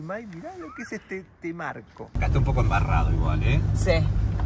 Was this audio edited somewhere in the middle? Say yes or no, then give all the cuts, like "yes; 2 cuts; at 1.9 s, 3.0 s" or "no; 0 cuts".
yes; 1 cut; at 2.1 s